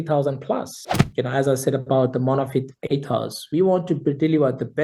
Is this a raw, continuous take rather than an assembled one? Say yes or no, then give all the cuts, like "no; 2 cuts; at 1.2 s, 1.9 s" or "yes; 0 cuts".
no; 1 cut; at 1.0 s